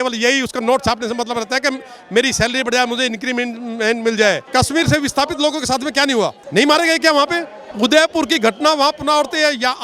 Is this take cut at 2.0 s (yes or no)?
no